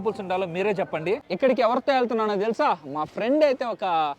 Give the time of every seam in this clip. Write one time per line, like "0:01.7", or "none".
0:01.2

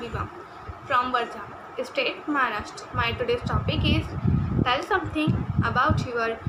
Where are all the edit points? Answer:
none

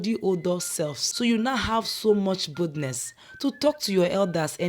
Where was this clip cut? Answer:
0:01.0

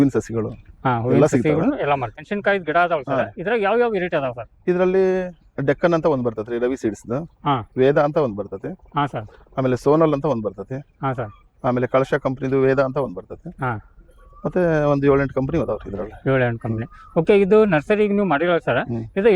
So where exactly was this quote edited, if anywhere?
0:02.1

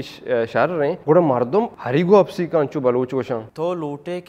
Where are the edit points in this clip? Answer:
0:01.0
0:01.8
0:03.5

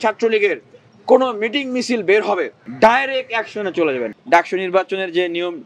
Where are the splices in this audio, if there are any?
0:02.6
0:04.1

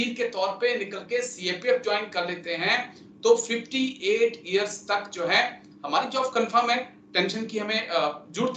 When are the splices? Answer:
none

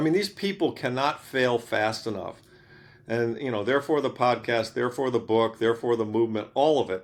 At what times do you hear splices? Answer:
none

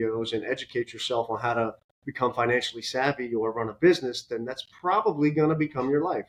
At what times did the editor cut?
none

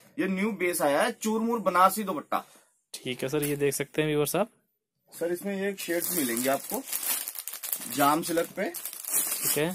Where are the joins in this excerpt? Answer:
none

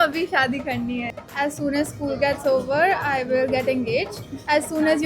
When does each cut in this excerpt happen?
0:01.1

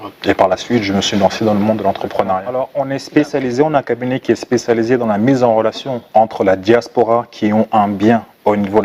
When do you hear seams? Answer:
0:02.6

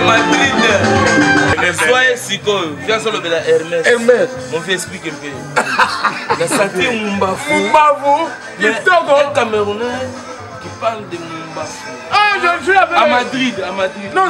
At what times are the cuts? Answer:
0:01.6

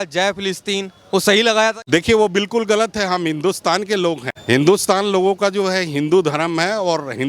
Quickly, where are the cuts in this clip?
0:01.8
0:04.3

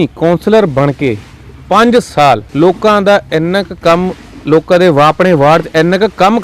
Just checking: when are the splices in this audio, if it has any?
0:02.5

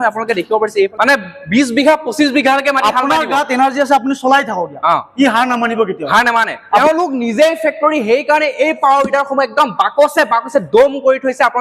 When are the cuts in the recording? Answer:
0:00.9
0:06.6

